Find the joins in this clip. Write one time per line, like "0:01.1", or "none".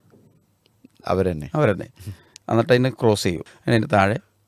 0:03.5